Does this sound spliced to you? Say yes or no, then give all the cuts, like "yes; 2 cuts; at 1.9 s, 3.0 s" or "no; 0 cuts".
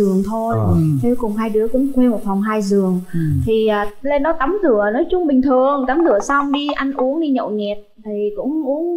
no; 0 cuts